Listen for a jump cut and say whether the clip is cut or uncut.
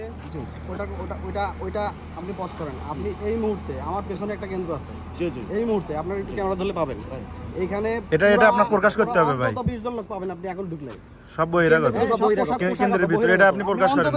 uncut